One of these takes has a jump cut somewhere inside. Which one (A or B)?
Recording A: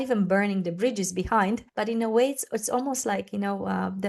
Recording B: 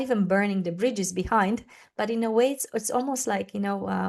A